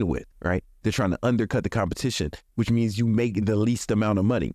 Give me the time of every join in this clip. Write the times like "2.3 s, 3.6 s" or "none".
2.4 s